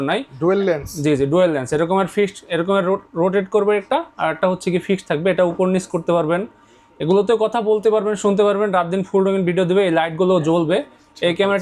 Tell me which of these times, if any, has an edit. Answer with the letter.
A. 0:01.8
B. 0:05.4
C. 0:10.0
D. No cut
D